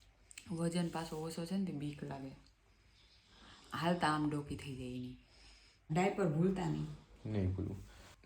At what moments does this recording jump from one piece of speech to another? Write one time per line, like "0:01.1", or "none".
0:05.9